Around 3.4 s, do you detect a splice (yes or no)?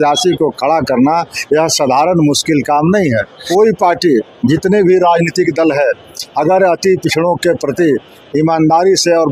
yes